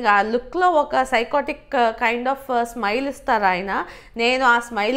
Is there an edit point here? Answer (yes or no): no